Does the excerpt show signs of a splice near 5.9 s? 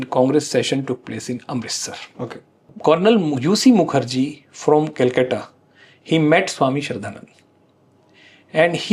no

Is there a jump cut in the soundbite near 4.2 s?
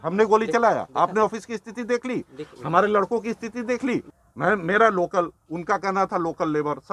yes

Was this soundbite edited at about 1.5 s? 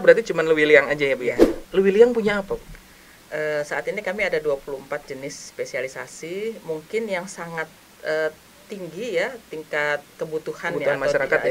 yes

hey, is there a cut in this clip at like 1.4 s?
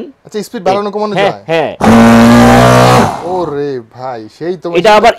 no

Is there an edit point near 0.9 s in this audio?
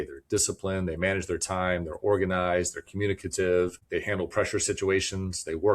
no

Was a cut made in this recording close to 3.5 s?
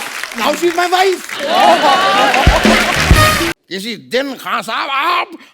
yes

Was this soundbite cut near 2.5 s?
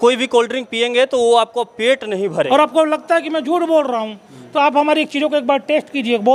yes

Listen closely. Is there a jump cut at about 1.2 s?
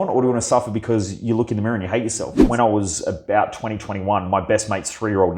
no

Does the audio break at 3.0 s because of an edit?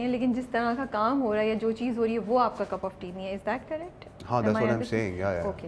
no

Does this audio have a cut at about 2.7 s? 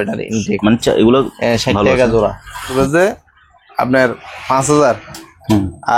yes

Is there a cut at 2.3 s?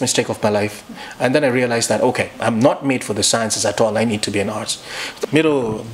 no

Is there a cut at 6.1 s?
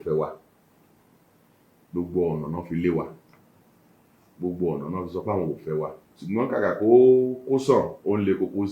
yes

